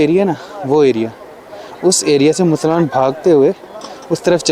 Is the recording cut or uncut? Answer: uncut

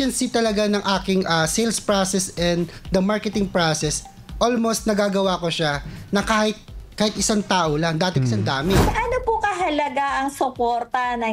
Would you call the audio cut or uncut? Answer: cut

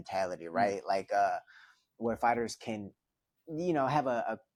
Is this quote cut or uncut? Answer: uncut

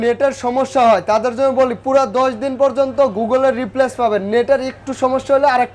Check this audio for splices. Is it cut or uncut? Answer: uncut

